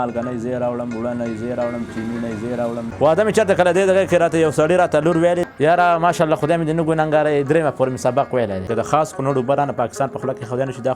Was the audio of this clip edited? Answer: yes; 3 cuts; at 2.9 s, 5.4 s, 8.7 s

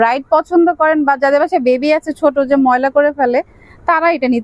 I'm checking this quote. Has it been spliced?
no; 0 cuts

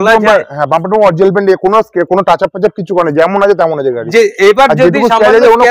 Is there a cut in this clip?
no; 0 cuts

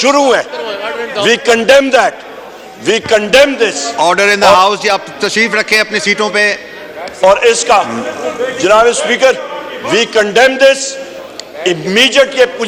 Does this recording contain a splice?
no; 0 cuts

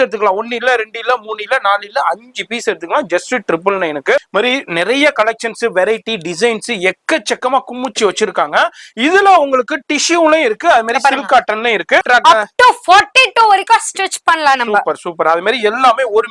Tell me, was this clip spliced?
yes; 2 cuts; at 4.3 s, 12.0 s

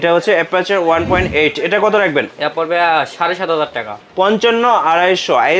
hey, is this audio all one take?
no; 1 cut; at 4.0 s

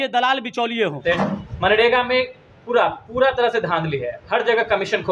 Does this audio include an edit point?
yes; 1 cut; at 1.0 s

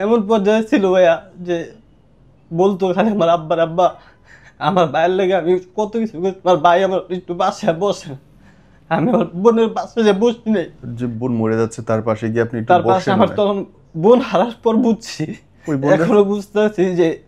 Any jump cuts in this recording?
yes; 2 cuts; at 10.8 s, 13.7 s

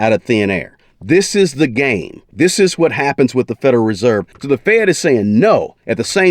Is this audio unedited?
no; 2 cuts; at 2.3 s, 4.3 s

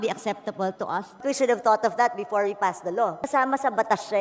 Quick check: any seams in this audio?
yes; 2 cuts; at 1.2 s, 3.2 s

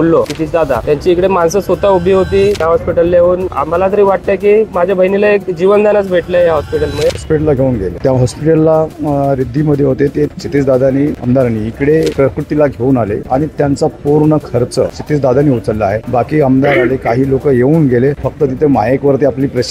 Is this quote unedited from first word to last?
no; 2 cuts; at 2.6 s, 7.1 s

